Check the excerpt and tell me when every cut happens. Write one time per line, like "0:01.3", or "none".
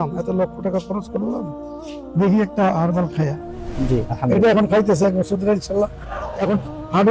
0:03.7